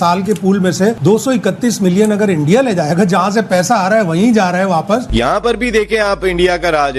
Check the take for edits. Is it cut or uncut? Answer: cut